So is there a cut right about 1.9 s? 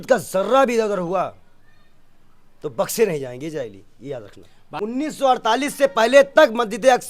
no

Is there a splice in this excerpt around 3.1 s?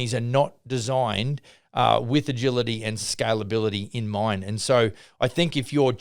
yes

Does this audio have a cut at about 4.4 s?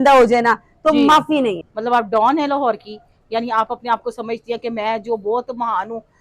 no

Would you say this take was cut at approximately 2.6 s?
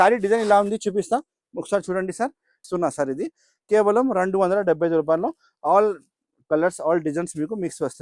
yes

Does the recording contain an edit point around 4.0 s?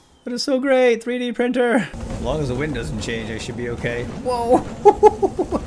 no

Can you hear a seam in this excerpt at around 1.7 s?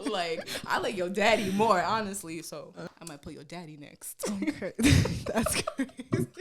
no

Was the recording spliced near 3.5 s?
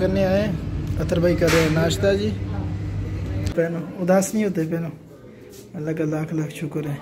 yes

